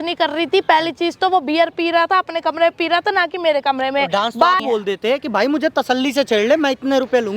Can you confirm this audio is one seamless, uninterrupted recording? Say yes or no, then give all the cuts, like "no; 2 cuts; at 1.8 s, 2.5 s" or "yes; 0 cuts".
no; 1 cut; at 4.6 s